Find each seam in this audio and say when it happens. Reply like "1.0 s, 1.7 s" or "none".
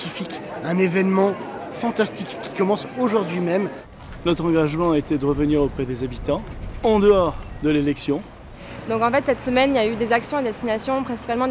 3.9 s, 8.4 s